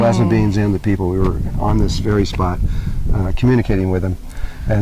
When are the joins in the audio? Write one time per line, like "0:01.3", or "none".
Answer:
0:03.3